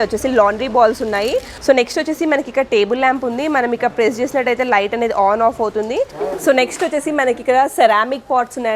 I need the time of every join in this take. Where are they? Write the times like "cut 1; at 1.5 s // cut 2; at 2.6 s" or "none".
cut 1; at 1.5 s // cut 2; at 6.2 s